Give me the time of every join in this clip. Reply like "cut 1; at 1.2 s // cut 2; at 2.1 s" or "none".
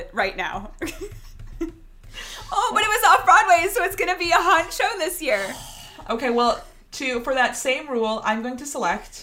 none